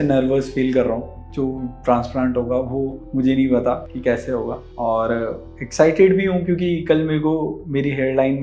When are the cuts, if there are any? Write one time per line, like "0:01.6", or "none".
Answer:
0:01.2